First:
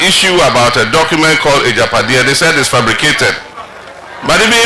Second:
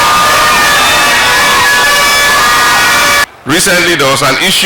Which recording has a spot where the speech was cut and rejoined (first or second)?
second